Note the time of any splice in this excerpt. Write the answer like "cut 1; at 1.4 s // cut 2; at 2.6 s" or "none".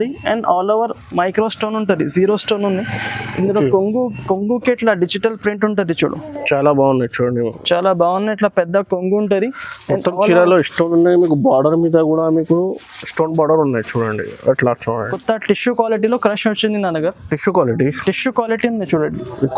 cut 1; at 15.1 s